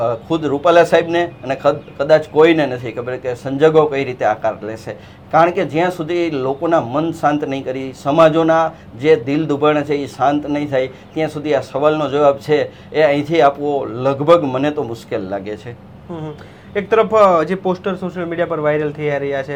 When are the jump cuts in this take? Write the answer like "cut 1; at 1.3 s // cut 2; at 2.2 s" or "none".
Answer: none